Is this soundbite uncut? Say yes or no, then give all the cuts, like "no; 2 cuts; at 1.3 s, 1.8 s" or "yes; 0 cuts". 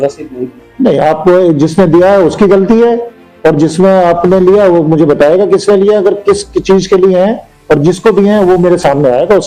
yes; 0 cuts